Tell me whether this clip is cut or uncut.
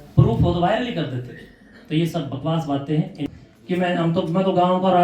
cut